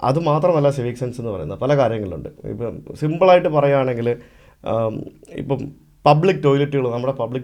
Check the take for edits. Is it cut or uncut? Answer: uncut